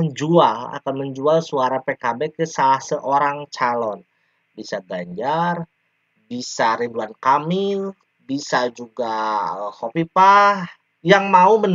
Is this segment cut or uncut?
uncut